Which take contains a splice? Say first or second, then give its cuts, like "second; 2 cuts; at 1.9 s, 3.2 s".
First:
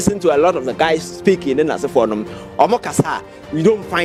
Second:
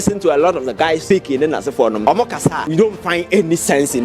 second; 2 cuts; at 1.0 s, 2.3 s